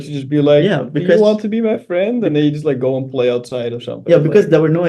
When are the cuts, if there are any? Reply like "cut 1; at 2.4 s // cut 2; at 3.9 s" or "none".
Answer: none